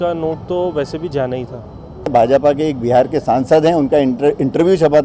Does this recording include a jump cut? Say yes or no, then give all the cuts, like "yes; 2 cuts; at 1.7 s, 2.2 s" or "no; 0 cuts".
yes; 1 cut; at 2.1 s